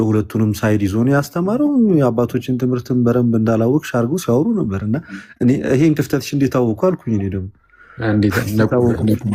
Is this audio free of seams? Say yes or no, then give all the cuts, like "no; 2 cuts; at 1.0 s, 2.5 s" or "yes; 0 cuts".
yes; 0 cuts